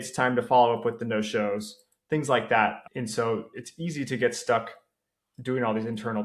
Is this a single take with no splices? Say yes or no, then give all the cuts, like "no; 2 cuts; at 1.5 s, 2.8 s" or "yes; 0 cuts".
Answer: no; 1 cut; at 2.8 s